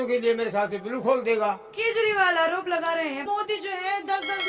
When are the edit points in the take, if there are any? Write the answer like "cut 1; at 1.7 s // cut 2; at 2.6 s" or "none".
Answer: cut 1; at 1.7 s // cut 2; at 3.2 s